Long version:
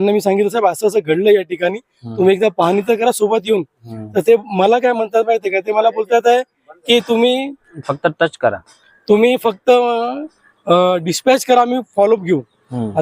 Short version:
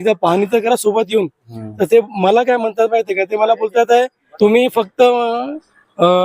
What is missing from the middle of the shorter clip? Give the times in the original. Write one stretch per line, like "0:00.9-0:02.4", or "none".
0:06.6-0:08.9